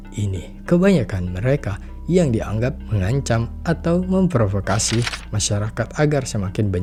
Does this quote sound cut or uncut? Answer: uncut